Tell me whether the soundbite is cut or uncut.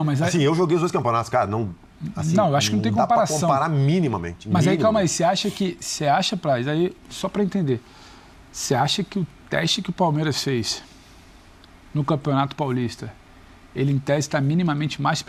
uncut